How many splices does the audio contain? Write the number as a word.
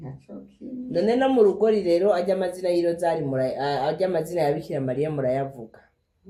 zero